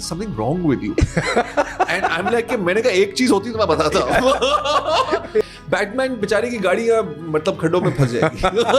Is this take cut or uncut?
cut